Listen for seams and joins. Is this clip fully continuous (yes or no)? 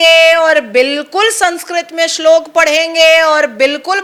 yes